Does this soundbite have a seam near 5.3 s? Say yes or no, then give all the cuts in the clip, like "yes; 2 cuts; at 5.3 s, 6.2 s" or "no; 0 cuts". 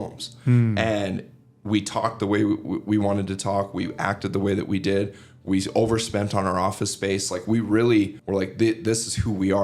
no; 1 cut; at 8.2 s